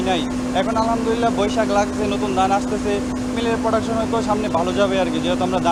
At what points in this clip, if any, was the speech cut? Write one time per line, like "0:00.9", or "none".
none